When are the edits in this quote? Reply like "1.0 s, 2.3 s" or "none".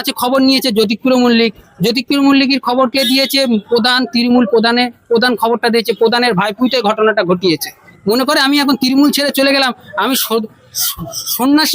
7.9 s